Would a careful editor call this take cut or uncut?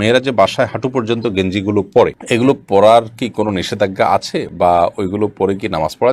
uncut